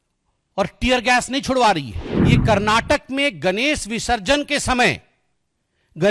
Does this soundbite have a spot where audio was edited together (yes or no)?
yes